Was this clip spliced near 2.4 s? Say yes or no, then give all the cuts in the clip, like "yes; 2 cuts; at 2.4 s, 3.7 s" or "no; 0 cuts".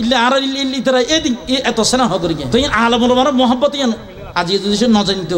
yes; 1 cut; at 2.4 s